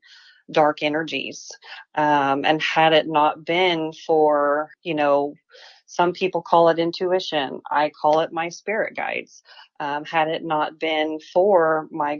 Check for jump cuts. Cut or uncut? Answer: cut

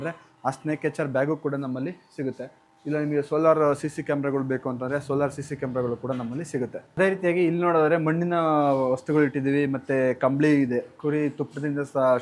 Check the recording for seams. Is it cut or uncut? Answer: uncut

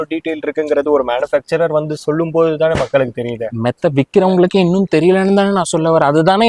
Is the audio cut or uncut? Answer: uncut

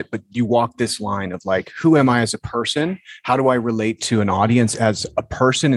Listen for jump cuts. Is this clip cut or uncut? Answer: uncut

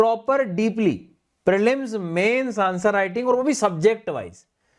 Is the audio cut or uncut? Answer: uncut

